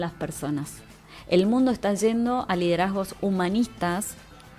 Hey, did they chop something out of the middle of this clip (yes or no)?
no